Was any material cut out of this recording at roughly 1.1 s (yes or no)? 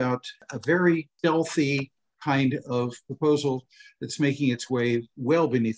yes